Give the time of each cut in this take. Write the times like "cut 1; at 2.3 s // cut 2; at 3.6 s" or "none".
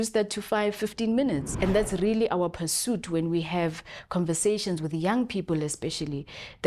cut 1; at 1.5 s